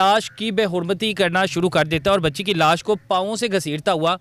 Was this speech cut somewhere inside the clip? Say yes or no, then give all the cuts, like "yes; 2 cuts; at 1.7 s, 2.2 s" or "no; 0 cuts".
no; 0 cuts